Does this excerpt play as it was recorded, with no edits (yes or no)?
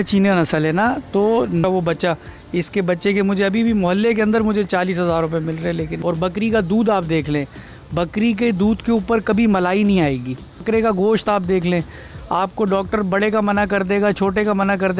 no